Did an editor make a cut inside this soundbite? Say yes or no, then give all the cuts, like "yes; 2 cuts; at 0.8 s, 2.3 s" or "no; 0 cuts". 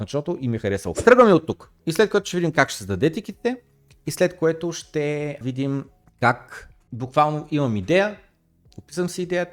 yes; 1 cut; at 0.9 s